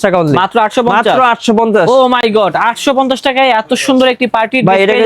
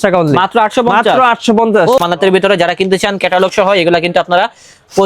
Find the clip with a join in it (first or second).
second